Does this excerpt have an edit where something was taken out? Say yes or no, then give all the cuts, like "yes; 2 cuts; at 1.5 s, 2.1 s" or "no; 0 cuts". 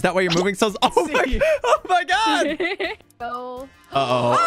yes; 1 cut; at 3.0 s